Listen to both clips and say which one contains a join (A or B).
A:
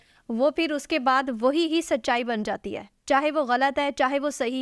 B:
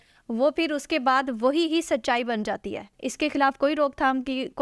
B